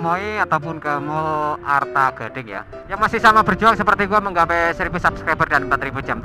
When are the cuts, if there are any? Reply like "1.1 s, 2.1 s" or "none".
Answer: 2.8 s